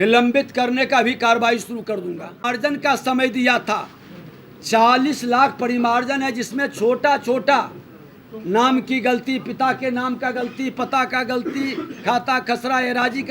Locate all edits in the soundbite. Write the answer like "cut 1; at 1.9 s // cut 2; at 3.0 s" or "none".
cut 1; at 2.4 s